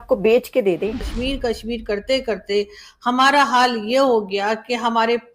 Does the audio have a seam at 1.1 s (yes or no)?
yes